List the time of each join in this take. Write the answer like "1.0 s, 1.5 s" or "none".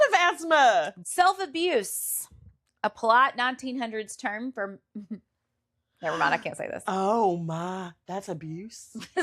1.0 s